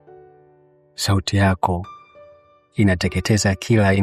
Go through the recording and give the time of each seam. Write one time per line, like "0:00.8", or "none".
0:01.0